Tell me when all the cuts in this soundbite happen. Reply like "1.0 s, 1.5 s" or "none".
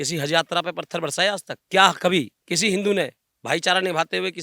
1.5 s